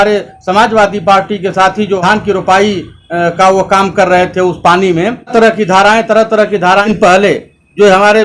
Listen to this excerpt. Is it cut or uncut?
cut